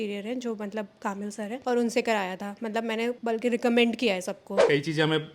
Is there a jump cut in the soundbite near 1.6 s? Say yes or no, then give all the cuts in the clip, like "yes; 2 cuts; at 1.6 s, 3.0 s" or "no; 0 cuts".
yes; 3 cuts; at 1.6 s, 3.2 s, 4.6 s